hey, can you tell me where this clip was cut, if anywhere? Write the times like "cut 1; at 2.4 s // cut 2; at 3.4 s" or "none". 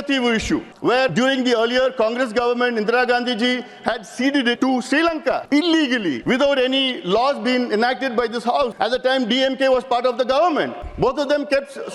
cut 1; at 0.9 s // cut 2; at 4.6 s // cut 3; at 5.4 s // cut 4; at 6.2 s // cut 5; at 8.7 s // cut 6; at 10.8 s